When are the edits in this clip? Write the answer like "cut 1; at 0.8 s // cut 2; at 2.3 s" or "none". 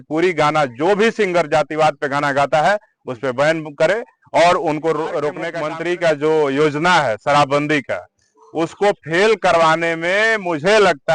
cut 1; at 5.5 s